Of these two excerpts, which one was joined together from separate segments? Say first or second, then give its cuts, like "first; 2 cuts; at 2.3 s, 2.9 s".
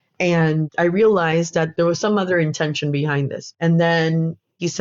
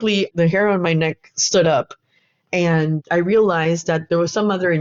first; 1 cut; at 3.4 s